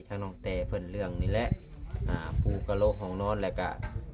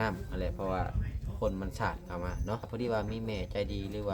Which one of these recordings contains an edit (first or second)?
second